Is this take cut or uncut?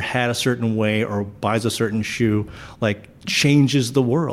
uncut